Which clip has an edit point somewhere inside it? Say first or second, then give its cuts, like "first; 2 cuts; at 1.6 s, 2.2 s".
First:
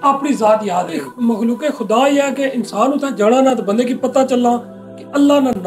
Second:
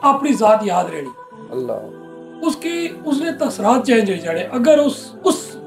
first; 1 cut; at 1.0 s